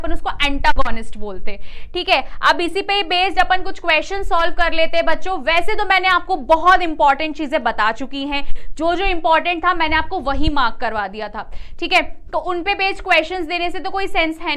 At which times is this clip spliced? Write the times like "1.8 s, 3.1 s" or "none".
none